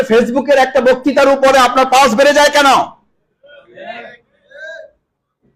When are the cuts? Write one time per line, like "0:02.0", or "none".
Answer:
none